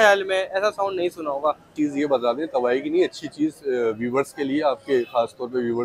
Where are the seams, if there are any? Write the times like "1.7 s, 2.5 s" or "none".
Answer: 1.7 s